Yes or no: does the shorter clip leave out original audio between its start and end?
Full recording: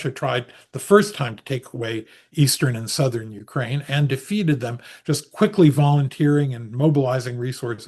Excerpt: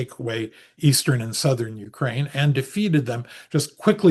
no